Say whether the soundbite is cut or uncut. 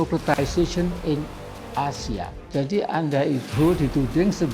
cut